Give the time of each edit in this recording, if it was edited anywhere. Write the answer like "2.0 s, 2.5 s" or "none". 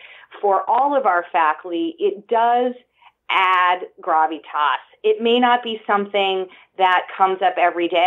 none

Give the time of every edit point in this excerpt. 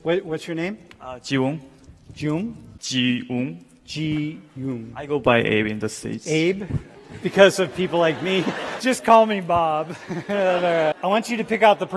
2.7 s, 8.7 s, 10.9 s

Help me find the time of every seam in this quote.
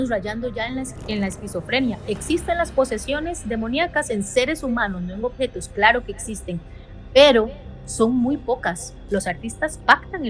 8.9 s

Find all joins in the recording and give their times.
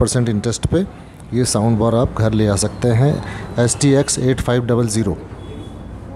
none

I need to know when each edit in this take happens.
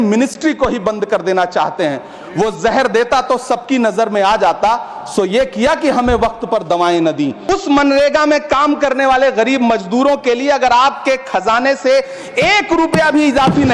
7.4 s

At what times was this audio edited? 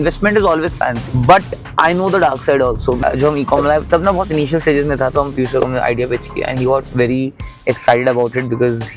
1.0 s, 3.0 s

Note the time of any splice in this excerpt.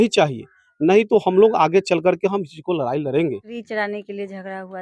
3.5 s

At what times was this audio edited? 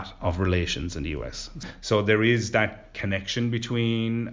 1.6 s, 3.0 s

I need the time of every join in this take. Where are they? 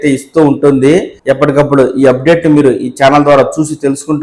1.1 s

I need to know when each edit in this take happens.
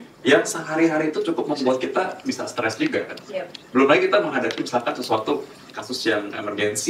none

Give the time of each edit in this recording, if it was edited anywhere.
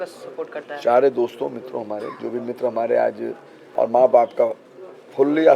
3.6 s

